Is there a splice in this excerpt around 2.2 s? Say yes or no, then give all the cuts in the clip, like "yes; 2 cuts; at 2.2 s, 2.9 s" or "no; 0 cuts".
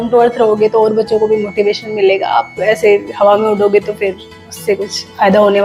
no; 0 cuts